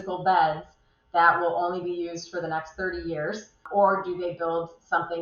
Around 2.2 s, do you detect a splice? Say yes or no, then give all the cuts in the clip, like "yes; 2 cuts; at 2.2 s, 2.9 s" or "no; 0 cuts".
no; 1 cut; at 3.7 s